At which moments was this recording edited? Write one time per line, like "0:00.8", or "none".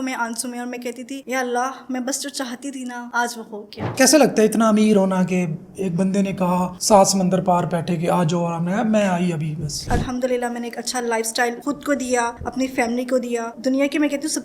0:03.8
0:09.8
0:13.5